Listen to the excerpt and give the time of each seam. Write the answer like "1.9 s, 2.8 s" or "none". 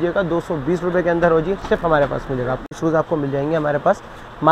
2.8 s